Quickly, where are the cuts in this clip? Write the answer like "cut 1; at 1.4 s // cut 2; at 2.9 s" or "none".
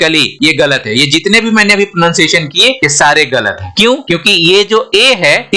none